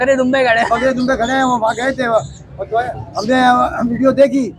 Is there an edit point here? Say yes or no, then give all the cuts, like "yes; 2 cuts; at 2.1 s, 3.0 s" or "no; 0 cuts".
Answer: no; 0 cuts